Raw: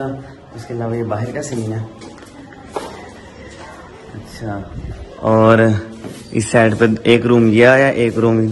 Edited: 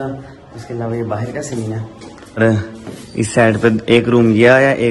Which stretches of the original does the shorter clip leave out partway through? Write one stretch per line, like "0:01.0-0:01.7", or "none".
0:02.4-0:05.6